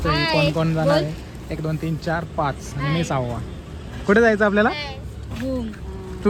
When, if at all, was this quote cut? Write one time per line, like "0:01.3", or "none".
none